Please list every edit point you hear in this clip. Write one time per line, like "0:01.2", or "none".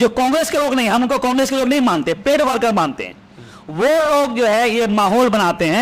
none

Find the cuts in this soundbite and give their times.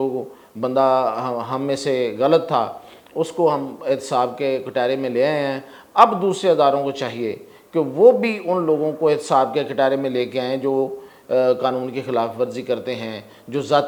none

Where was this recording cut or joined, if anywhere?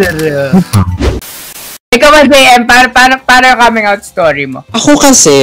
0:01.4

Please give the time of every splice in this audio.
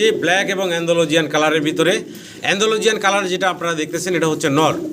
none

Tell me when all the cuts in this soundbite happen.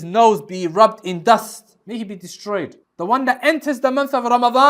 0:02.8

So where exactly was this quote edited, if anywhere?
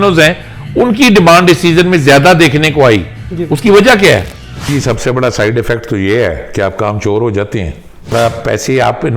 0:04.6
0:08.1

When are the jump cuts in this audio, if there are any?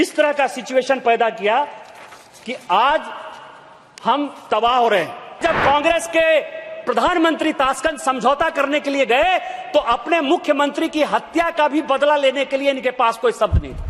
0:05.4

